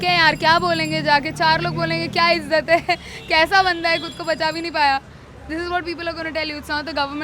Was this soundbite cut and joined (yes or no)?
no